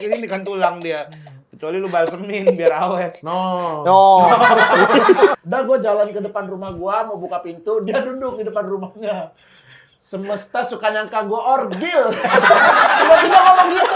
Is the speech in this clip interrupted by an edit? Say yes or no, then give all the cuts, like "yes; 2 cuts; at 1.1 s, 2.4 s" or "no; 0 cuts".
yes; 1 cut; at 5.3 s